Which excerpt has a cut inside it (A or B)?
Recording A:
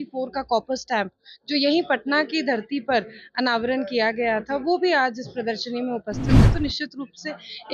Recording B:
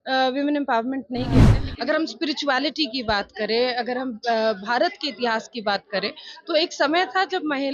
B